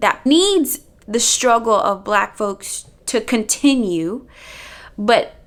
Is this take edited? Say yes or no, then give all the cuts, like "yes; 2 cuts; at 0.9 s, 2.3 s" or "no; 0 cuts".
no; 0 cuts